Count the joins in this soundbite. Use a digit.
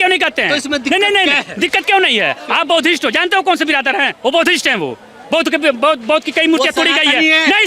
0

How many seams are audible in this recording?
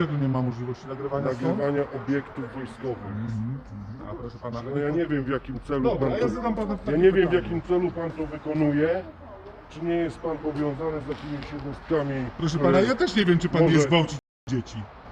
0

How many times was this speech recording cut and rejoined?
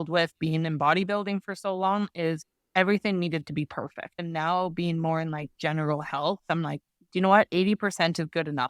2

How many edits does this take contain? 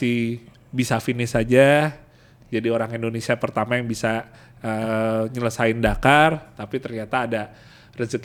0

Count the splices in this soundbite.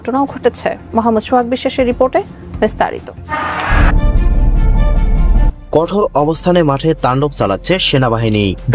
1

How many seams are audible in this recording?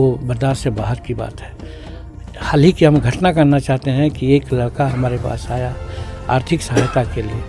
0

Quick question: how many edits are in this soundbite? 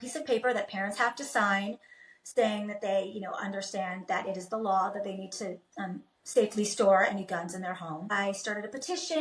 1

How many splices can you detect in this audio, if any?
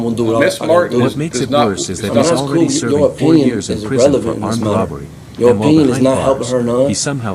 0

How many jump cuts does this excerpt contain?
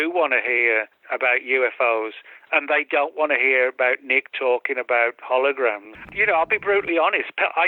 2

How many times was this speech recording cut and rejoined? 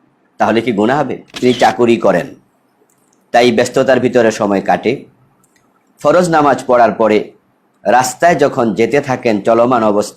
1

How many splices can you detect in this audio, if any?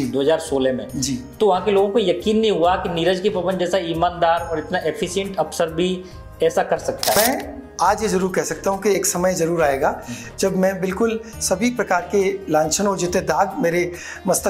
1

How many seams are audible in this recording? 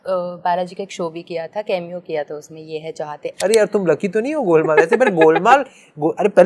1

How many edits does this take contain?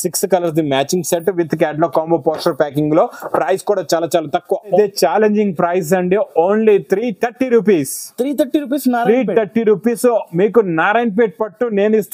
1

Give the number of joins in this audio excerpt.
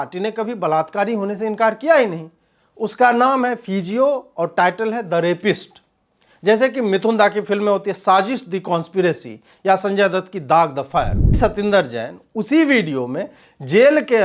1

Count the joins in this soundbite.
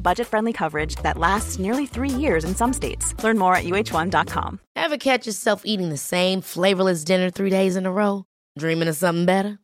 1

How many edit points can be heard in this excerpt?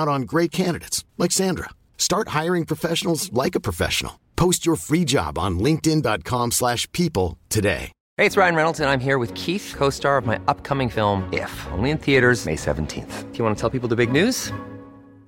1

